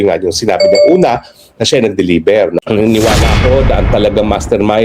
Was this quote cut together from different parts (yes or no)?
yes